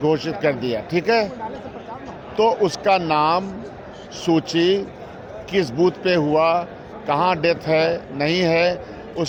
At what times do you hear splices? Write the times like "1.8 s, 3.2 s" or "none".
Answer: none